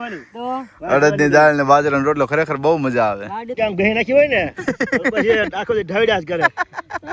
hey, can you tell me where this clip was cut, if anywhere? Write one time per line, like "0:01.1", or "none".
0:03.5